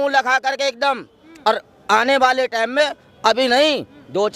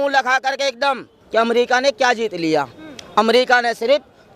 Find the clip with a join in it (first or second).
second